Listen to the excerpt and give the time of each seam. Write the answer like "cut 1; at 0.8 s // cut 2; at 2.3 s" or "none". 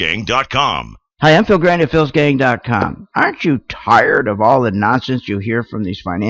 cut 1; at 1.0 s